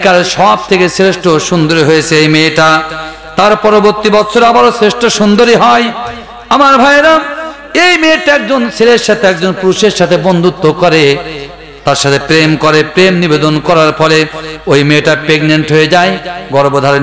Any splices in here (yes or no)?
no